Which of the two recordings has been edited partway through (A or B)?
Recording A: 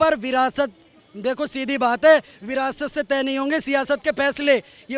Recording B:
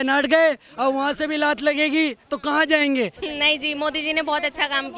B